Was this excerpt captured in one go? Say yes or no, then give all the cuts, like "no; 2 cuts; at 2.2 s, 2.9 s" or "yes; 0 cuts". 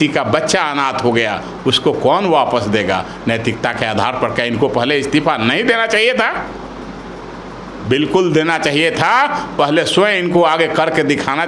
yes; 0 cuts